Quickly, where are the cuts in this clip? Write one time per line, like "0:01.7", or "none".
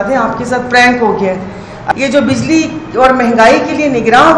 0:01.7